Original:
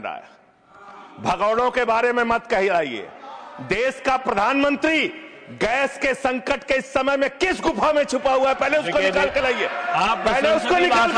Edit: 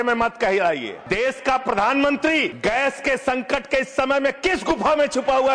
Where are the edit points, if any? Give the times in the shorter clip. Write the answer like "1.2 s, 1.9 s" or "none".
1.0 s, 2.5 s